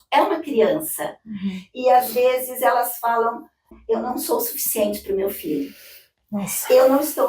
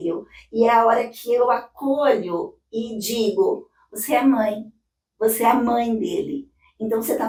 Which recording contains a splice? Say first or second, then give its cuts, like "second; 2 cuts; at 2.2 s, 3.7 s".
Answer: first; 1 cut; at 3.7 s